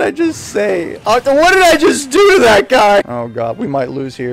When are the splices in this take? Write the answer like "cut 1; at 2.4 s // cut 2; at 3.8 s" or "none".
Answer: cut 1; at 3.1 s